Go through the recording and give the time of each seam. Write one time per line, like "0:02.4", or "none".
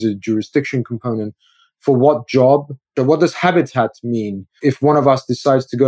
0:02.9
0:04.7